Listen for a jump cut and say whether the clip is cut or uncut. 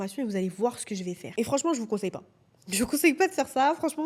uncut